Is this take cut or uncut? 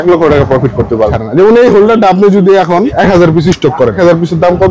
cut